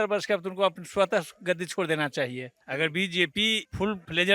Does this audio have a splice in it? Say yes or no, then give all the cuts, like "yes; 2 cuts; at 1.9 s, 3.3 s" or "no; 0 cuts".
yes; 1 cut; at 2.6 s